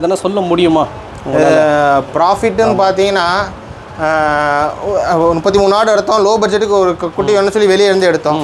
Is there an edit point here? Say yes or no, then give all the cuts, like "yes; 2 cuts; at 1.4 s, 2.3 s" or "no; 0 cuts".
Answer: no; 0 cuts